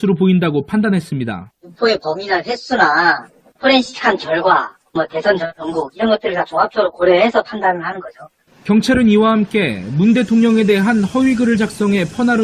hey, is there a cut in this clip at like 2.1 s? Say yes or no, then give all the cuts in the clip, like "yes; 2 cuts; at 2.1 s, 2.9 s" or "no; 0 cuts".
yes; 1 cut; at 2.1 s